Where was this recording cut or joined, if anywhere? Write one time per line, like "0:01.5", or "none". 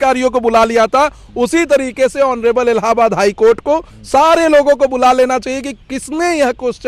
none